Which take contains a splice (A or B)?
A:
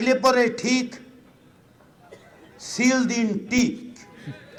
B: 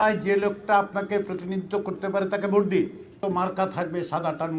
B